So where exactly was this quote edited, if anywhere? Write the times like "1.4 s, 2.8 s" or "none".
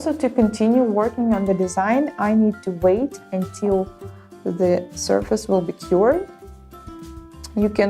2.7 s